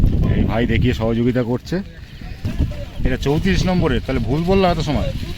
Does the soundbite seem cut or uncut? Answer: cut